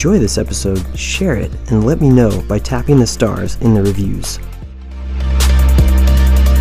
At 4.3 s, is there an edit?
yes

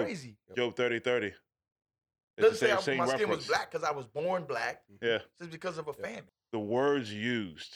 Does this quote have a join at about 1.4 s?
no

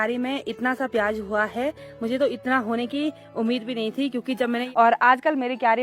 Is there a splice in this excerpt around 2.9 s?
no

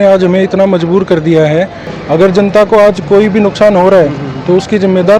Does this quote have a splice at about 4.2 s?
no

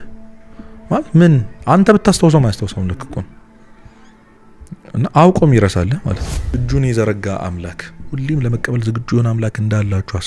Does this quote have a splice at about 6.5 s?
yes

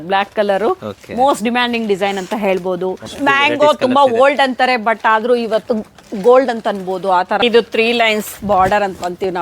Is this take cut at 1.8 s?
no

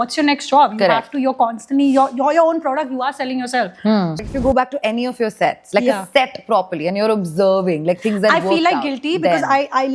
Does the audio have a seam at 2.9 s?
no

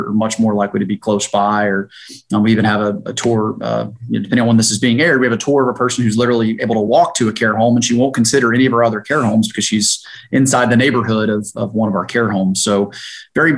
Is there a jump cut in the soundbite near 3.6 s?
no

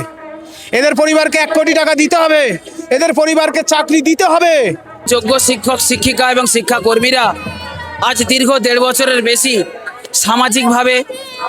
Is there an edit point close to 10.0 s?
no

